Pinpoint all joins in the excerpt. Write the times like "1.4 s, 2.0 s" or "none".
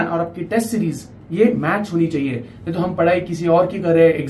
none